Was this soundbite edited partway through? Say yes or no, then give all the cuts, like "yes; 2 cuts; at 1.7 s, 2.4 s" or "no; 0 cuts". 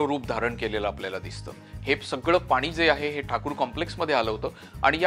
yes; 1 cut; at 1.7 s